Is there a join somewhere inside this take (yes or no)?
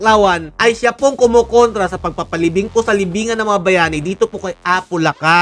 no